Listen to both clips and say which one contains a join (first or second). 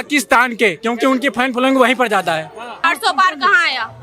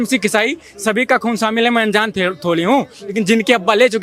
first